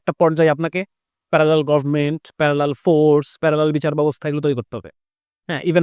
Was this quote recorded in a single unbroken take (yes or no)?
yes